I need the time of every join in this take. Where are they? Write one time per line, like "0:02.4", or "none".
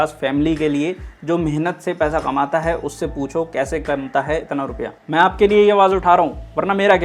0:05.0